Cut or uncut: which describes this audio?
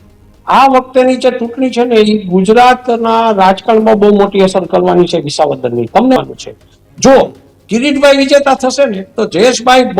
cut